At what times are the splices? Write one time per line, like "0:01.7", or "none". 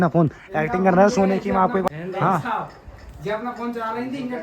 0:01.9

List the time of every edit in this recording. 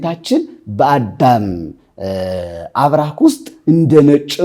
none

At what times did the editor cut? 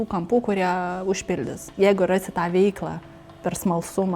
0:01.7

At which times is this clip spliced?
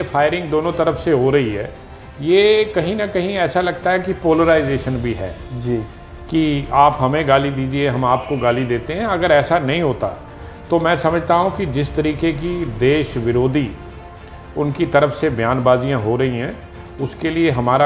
none

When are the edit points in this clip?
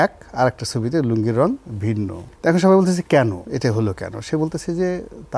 0:02.2
0:03.4

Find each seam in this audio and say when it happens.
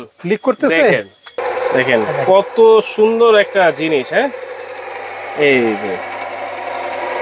0:01.4

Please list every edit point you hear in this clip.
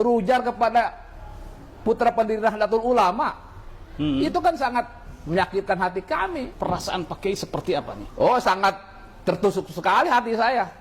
0:06.5

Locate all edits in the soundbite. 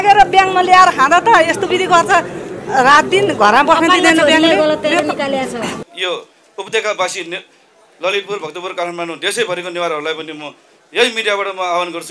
0:05.8

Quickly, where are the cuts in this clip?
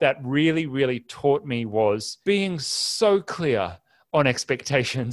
0:02.1

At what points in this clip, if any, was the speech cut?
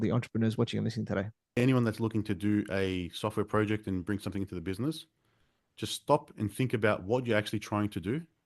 0:01.6

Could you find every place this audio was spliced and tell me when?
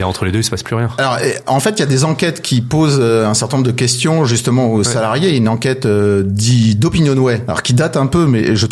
none

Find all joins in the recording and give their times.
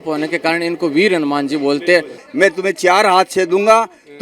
0:02.2

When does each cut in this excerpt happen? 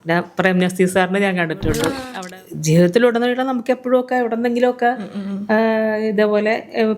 0:02.1

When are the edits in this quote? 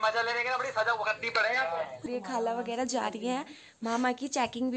0:02.0

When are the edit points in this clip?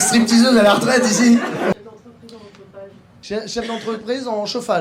0:01.7

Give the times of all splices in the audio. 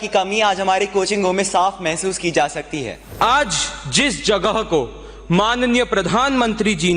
0:03.0

